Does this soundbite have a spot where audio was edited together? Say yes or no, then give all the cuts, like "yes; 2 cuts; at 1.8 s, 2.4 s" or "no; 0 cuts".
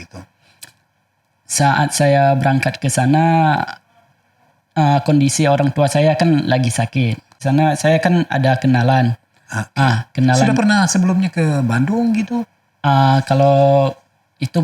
yes; 1 cut; at 7.4 s